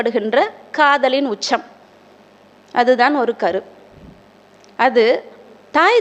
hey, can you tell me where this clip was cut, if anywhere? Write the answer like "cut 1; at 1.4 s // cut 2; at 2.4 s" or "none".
none